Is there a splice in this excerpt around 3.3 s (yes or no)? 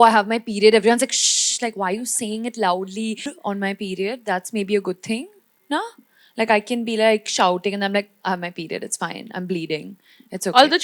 yes